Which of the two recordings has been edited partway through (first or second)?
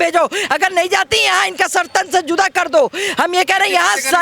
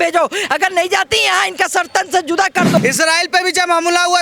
second